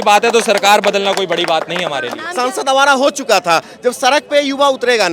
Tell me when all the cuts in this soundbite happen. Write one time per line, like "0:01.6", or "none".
0:02.2